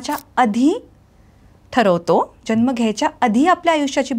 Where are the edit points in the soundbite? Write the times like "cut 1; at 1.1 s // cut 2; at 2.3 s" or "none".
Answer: none